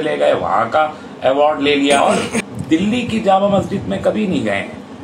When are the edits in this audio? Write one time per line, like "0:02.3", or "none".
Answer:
0:02.0